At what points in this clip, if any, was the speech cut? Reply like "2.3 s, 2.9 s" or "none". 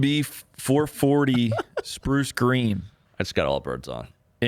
3.0 s